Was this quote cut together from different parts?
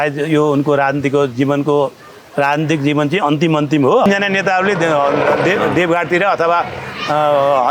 yes; 1 cut; at 4.1 s

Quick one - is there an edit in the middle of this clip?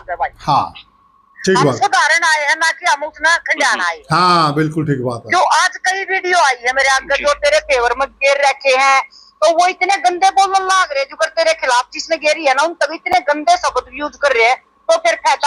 no; 0 cuts

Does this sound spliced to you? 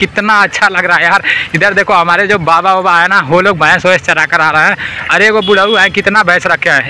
no; 0 cuts

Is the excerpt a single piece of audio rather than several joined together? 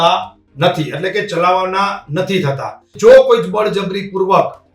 no; 1 cut; at 2.9 s

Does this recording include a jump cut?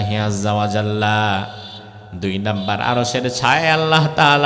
no; 0 cuts

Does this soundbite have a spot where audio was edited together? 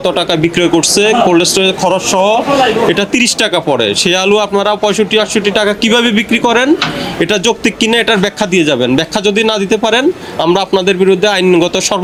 no; 0 cuts

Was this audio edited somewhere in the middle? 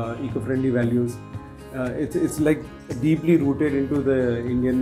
no; 0 cuts

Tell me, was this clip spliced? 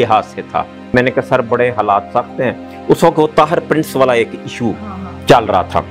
yes; 1 cut; at 0.9 s

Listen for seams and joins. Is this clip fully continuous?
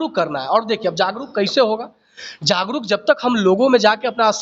yes; 0 cuts

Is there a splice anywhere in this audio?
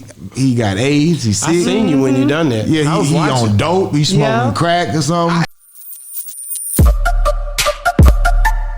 yes; 1 cut; at 5.5 s

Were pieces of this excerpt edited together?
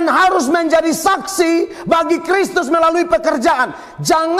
no; 0 cuts

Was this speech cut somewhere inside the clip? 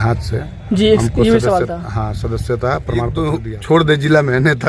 yes; 1 cut; at 3.1 s

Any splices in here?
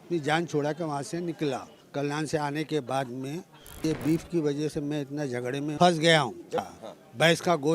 yes; 4 cuts; at 1.8 s, 3.8 s, 5.7 s, 6.7 s

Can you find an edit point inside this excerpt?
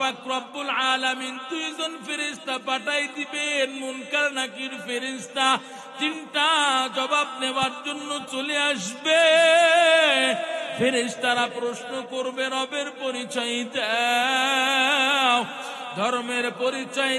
yes; 1 cut; at 10.7 s

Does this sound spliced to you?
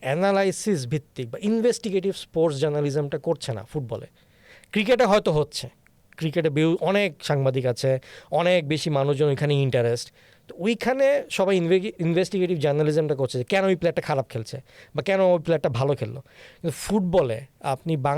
no; 0 cuts

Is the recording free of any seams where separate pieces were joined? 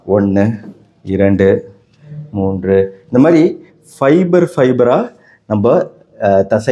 yes; 0 cuts

